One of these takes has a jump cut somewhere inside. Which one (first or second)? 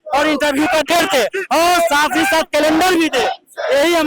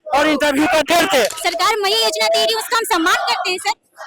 second